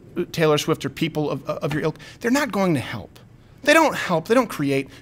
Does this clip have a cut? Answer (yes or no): no